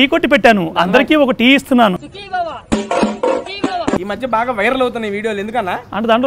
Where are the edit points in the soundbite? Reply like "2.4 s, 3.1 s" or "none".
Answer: 4.0 s

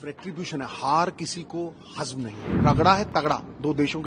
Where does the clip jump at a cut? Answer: 2.6 s

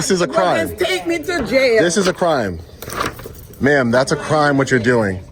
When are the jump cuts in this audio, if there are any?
none

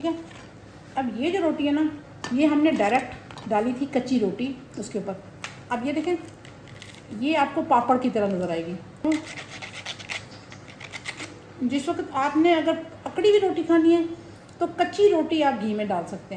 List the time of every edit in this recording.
2.1 s, 9.0 s

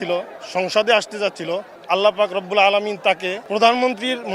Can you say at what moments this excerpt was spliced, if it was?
1.7 s, 3.3 s

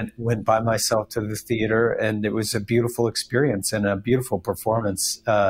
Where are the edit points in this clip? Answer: none

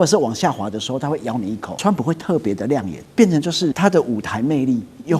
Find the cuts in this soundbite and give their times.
1.7 s, 3.0 s, 3.8 s

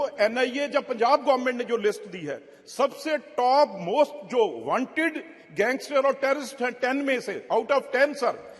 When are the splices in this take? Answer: none

